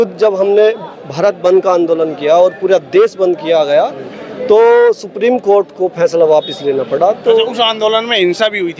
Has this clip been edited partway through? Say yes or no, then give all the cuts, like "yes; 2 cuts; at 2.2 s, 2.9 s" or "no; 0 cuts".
no; 0 cuts